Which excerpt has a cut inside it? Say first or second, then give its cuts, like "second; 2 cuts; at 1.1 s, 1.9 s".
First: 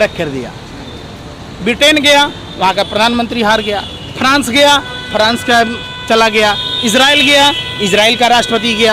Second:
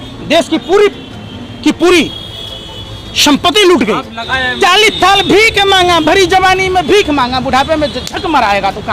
second; 1 cut; at 4.3 s